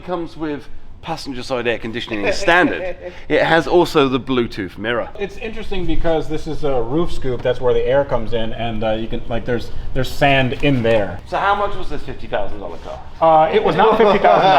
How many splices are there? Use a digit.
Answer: 2